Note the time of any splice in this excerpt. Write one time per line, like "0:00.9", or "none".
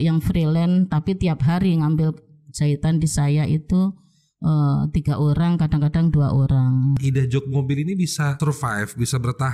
0:07.0
0:08.4